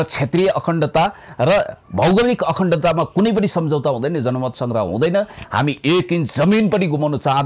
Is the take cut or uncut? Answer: uncut